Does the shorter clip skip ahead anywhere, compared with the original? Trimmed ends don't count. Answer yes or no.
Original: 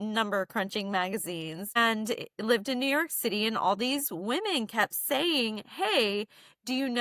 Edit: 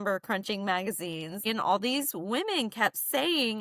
yes